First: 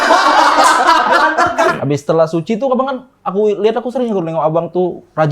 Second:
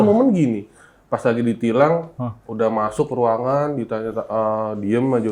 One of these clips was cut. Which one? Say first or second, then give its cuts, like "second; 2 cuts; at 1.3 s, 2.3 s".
first; 1 cut; at 1.7 s